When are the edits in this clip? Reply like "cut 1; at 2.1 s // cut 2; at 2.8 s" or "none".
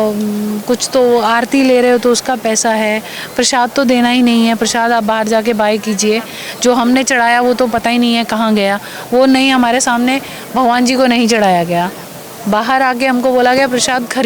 cut 1; at 12.0 s